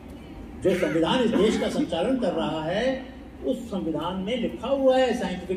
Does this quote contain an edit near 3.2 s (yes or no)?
no